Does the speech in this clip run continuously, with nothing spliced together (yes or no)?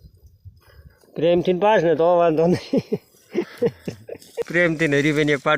yes